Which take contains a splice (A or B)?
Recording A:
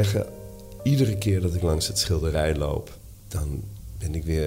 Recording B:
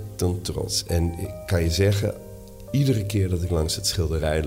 A